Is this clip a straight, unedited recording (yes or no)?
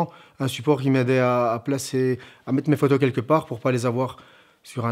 yes